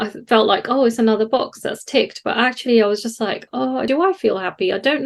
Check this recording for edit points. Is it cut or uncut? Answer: cut